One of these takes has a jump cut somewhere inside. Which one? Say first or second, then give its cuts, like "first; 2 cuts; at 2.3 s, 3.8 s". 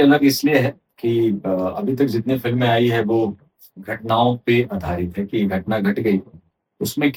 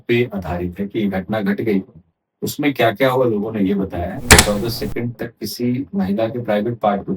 second; 1 cut; at 4.2 s